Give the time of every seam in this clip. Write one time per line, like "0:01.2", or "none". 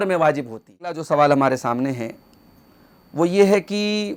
0:01.0